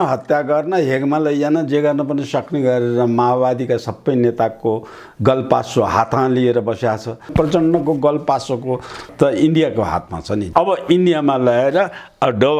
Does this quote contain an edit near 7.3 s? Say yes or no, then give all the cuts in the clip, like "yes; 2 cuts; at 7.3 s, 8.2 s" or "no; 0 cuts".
yes; 3 cuts; at 7.3 s, 9.1 s, 10.4 s